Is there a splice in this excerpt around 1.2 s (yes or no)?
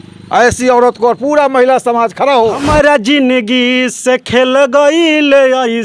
no